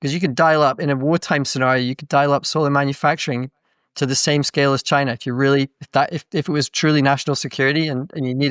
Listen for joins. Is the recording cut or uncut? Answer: uncut